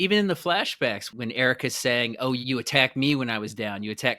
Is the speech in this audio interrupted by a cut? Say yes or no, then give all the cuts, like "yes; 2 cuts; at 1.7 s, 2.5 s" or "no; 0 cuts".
yes; 2 cuts; at 1.1 s, 2.4 s